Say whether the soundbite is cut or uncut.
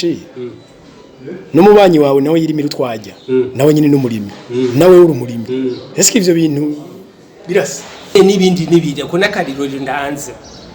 cut